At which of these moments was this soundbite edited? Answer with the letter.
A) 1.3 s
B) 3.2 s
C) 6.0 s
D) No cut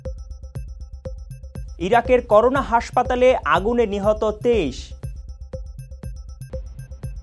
A